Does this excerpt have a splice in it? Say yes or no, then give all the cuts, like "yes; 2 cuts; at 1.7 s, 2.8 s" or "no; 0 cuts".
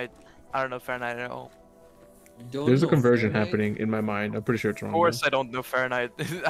no; 0 cuts